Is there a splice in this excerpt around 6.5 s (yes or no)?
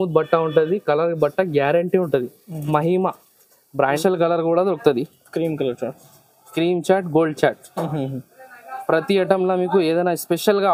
no